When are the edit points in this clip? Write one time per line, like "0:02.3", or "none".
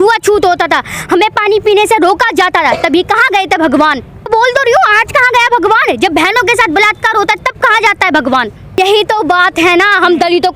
0:04.3
0:08.8